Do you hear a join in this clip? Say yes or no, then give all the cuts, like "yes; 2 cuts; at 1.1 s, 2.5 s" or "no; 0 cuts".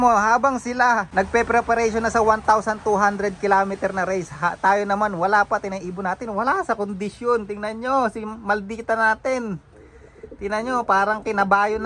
yes; 1 cut; at 1.1 s